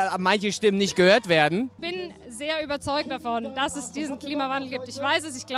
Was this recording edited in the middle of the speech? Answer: yes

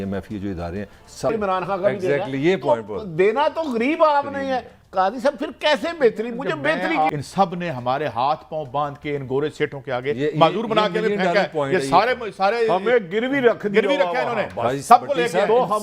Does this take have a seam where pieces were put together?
yes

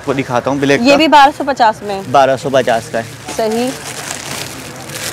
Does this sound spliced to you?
no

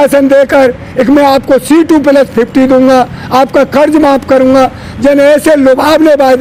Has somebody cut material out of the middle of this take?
no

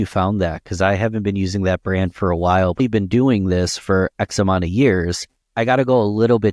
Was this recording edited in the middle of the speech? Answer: yes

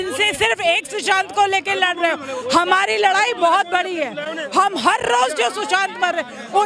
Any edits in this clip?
no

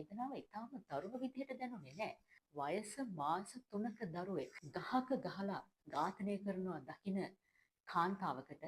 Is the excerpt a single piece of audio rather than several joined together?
no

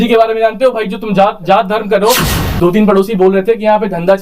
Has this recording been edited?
yes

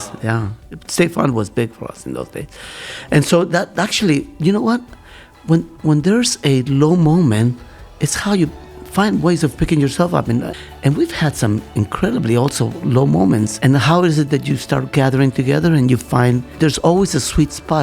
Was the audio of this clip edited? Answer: yes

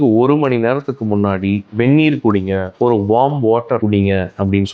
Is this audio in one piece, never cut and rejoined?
no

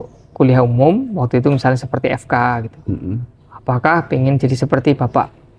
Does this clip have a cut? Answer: no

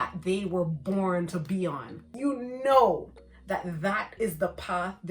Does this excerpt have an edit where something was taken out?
yes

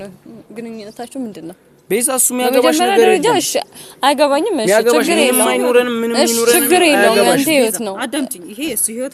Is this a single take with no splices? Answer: yes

